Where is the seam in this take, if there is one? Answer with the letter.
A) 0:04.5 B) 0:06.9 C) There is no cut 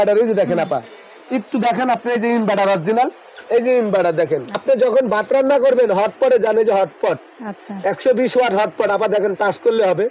A